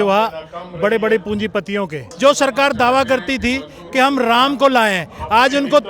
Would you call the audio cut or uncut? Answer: cut